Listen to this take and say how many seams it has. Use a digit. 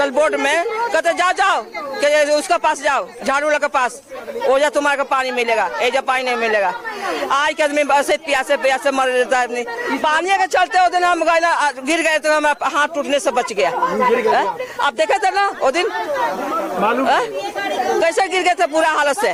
0